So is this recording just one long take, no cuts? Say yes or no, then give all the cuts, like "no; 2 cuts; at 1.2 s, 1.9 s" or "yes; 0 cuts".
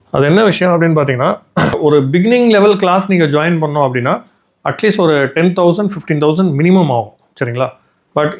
no; 1 cut; at 1.8 s